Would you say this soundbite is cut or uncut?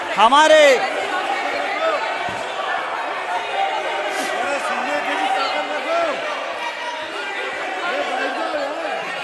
uncut